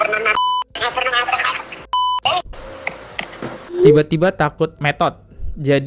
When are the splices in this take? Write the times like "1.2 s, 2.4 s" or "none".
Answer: 3.6 s